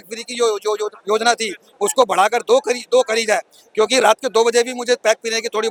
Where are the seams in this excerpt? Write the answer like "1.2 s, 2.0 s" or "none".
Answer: none